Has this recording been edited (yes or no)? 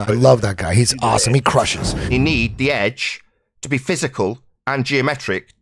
yes